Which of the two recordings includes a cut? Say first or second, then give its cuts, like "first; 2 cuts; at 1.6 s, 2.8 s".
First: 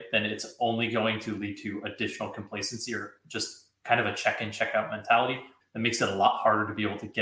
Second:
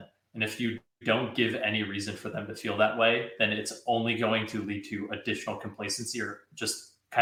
first; 1 cut; at 5.6 s